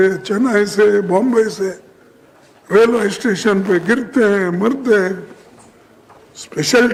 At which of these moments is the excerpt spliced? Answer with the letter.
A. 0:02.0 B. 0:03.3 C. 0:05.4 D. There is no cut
D